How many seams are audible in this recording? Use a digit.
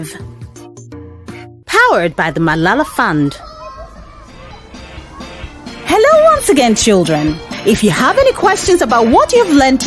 1